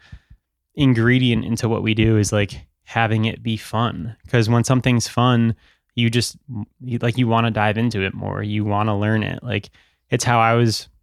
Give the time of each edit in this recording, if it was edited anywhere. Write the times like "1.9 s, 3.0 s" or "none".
none